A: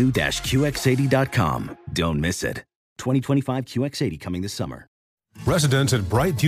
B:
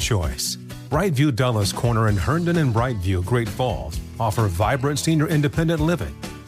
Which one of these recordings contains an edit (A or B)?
A